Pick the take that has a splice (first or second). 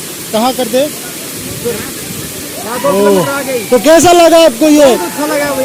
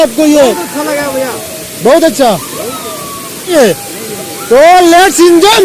second